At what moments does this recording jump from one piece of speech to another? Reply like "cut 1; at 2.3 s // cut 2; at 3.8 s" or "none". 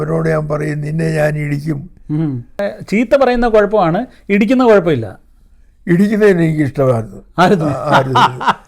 cut 1; at 2.6 s

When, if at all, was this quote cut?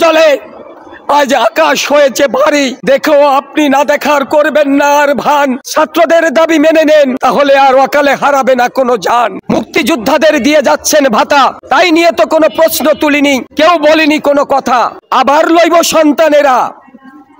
cut 1; at 2.8 s // cut 2; at 5.6 s // cut 3; at 7.2 s // cut 4; at 9.4 s // cut 5; at 11.6 s // cut 6; at 13.5 s // cut 7; at 15.0 s

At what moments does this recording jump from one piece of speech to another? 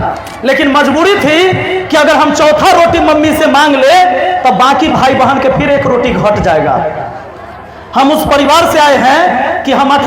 none

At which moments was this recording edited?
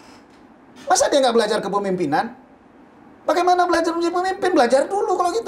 none

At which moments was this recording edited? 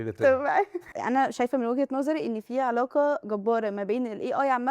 cut 1; at 1.0 s

